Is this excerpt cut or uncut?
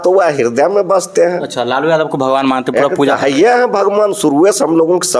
uncut